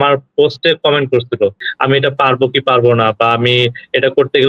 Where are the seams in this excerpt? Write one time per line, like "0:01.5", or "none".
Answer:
0:01.6